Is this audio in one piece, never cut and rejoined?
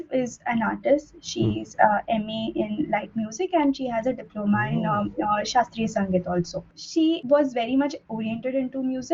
yes; 0 cuts

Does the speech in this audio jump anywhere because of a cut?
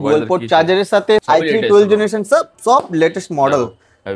yes; 1 cut; at 1.2 s

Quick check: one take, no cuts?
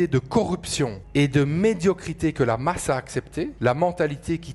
no; 2 cuts; at 1.0 s, 3.5 s

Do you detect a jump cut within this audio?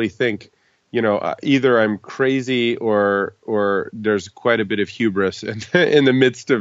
no; 0 cuts

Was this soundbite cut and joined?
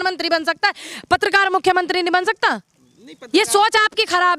no; 0 cuts

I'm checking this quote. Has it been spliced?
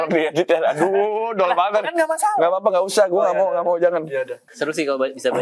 yes; 1 cut; at 4.4 s

